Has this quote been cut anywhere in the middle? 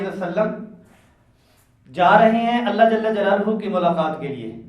no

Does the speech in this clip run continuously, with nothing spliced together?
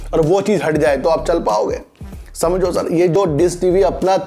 yes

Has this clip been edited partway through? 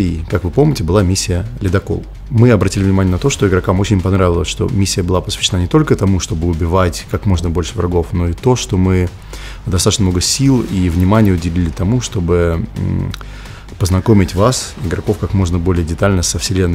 yes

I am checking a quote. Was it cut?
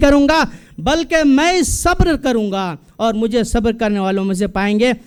no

